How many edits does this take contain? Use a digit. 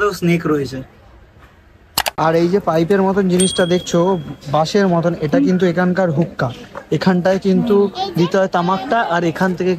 1